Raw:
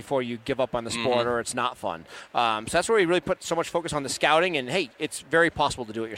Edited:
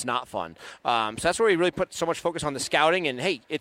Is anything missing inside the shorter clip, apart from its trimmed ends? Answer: no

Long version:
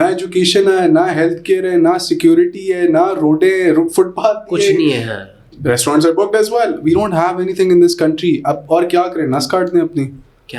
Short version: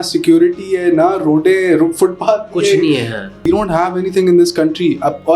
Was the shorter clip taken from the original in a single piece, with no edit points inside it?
no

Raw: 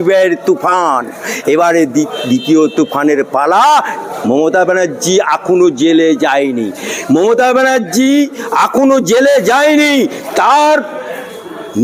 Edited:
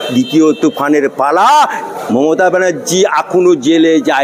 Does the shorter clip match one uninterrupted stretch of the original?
yes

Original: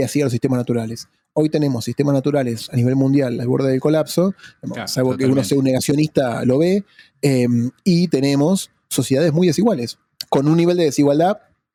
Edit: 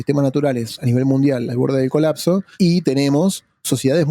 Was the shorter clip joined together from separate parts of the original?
yes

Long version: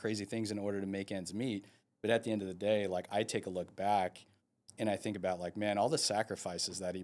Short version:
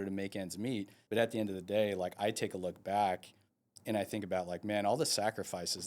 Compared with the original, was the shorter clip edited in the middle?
yes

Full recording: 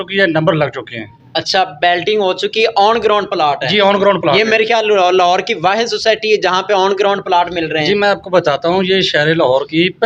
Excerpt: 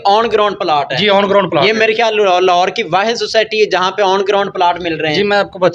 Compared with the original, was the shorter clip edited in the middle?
no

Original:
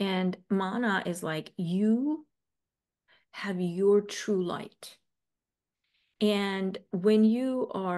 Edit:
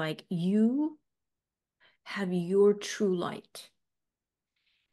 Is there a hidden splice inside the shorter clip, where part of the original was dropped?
no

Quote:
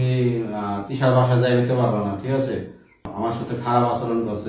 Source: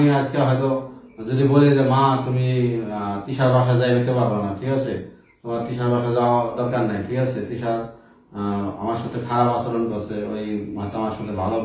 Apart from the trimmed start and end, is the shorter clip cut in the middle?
yes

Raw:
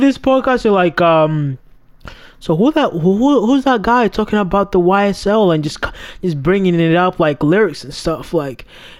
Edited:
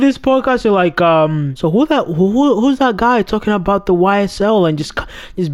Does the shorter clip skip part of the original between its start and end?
yes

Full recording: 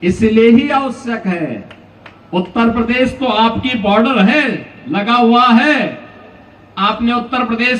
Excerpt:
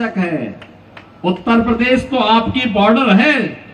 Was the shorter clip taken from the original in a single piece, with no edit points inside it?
yes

